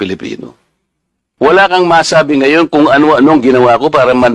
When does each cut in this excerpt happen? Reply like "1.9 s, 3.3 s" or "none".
1.2 s